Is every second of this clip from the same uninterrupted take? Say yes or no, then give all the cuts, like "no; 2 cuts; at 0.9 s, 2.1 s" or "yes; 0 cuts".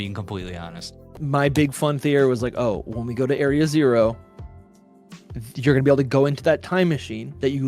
no; 1 cut; at 1.2 s